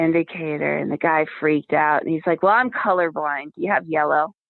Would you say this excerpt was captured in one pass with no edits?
yes; 0 cuts

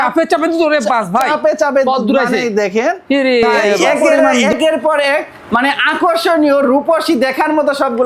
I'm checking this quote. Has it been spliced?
yes; 1 cut; at 4.3 s

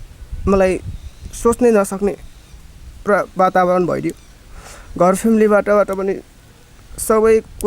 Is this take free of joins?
yes; 0 cuts

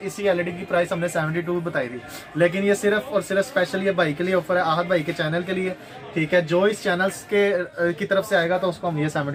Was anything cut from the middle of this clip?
no; 0 cuts

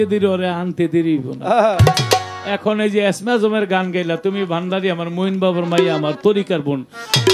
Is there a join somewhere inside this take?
no; 0 cuts

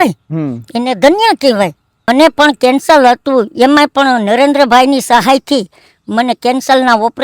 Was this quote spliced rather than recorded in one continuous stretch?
yes; 1 cut; at 2.1 s

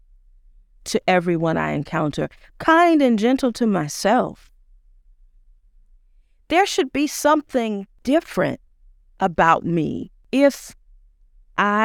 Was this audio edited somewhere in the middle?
yes; 2 cuts; at 7.9 s, 10.1 s

